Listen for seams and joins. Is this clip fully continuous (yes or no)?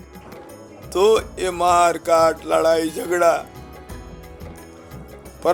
yes